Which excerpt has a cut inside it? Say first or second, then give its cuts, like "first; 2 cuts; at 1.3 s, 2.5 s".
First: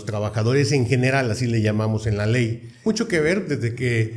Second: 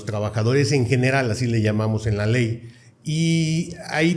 first; 1 cut; at 2.9 s